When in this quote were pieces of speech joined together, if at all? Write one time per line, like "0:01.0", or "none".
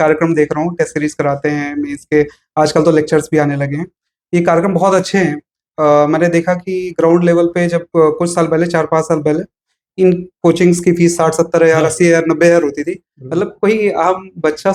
none